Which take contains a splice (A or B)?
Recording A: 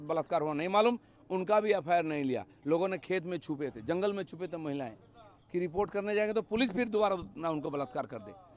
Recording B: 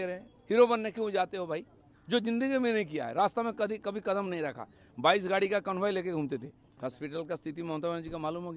B